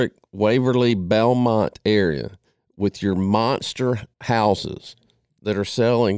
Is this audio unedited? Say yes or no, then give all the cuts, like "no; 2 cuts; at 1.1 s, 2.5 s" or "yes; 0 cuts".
no; 1 cut; at 4.1 s